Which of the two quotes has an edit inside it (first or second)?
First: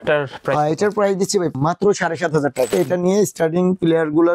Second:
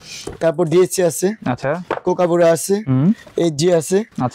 first